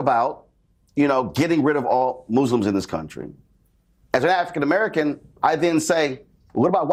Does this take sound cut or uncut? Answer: uncut